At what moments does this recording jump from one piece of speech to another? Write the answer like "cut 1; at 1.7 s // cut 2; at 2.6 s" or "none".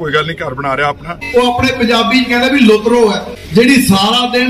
cut 1; at 1.1 s // cut 2; at 3.3 s